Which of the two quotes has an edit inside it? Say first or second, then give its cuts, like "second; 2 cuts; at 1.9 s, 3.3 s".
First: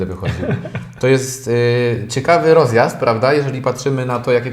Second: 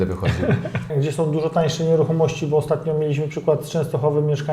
second; 1 cut; at 0.9 s